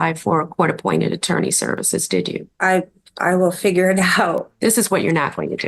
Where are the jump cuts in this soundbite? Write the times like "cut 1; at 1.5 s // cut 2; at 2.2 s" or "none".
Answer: cut 1; at 2.5 s // cut 2; at 4.5 s